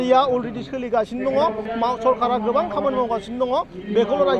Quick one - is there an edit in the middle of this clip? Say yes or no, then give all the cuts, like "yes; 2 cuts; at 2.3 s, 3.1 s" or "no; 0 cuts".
yes; 1 cut; at 1.7 s